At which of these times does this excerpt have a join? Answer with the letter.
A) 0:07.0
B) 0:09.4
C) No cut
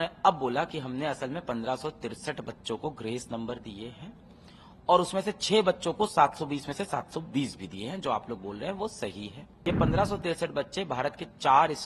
B